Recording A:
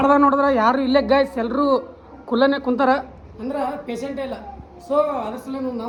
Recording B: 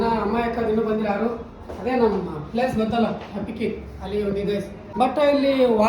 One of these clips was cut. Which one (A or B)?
B